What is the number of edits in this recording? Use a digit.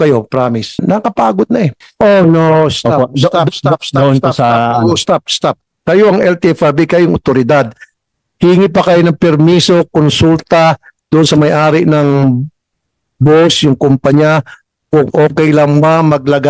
3